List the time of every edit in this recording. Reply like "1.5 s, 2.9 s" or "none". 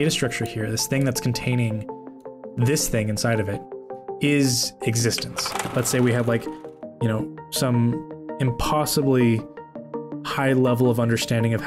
5.6 s